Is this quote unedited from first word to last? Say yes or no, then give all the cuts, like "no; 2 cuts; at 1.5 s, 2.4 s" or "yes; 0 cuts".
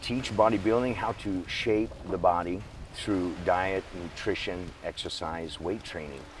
yes; 0 cuts